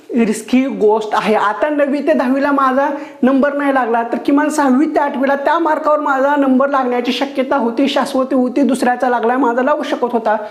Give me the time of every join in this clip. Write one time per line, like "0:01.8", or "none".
none